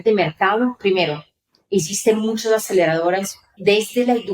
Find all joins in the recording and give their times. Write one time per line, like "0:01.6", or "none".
0:03.4